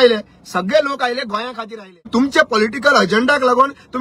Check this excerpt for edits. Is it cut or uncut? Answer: cut